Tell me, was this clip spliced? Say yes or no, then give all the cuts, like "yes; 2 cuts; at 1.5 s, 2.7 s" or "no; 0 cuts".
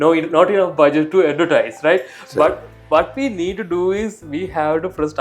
no; 0 cuts